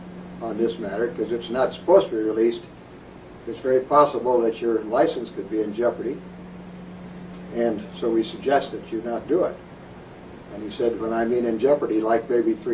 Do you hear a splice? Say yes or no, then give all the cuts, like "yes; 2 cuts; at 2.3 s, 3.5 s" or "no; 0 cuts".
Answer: no; 0 cuts